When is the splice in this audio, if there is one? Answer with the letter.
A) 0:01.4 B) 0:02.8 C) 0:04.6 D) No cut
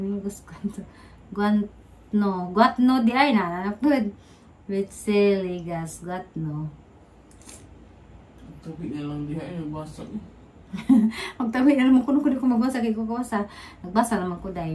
A